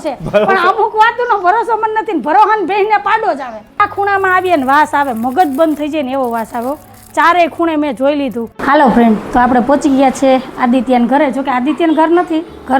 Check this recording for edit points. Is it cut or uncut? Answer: cut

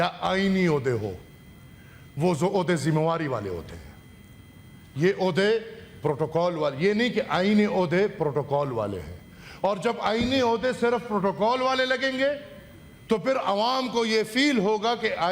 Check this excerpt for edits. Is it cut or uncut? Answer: uncut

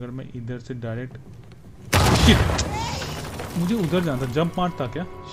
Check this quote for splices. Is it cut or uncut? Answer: uncut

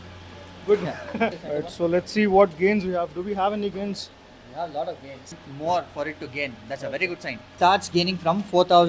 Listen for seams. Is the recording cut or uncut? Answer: cut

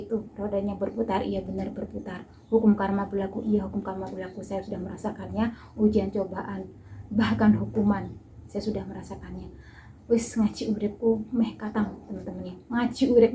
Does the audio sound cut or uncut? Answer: uncut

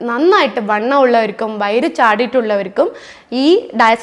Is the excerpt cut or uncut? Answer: uncut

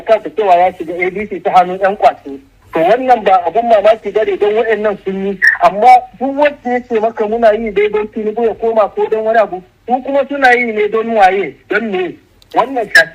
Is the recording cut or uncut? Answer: uncut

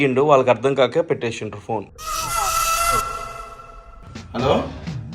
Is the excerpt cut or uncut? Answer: cut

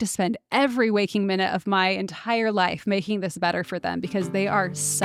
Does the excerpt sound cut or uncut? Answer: uncut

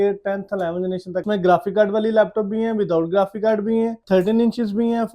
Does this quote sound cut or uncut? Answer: cut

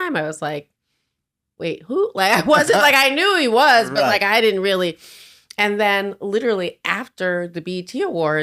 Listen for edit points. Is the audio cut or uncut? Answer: uncut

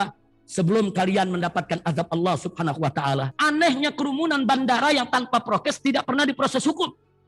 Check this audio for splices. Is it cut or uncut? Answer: cut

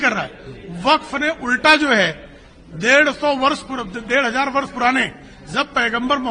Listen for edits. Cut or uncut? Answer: uncut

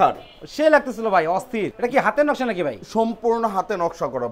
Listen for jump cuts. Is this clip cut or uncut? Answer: uncut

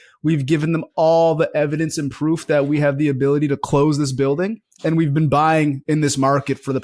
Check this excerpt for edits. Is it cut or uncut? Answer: cut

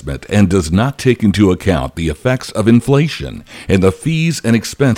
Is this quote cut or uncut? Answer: uncut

